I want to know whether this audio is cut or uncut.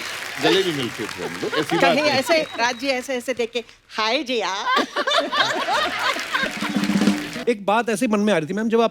cut